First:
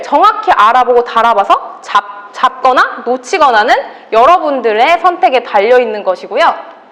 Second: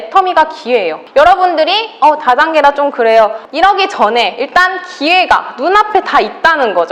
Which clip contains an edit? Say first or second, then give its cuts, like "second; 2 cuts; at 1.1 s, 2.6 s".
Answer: second; 2 cuts; at 1.0 s, 3.4 s